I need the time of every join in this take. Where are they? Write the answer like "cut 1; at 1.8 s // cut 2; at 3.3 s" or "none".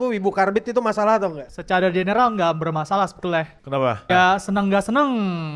cut 1; at 1.5 s // cut 2; at 4.1 s